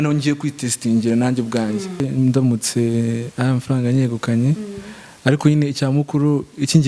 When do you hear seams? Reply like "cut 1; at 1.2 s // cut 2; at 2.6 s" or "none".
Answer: cut 1; at 2.0 s